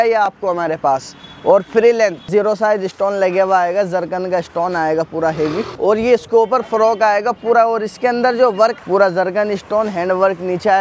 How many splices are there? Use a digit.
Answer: 3